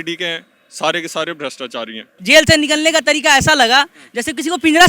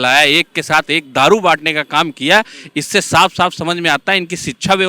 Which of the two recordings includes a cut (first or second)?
first